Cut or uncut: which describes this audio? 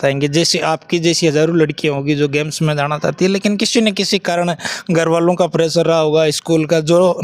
uncut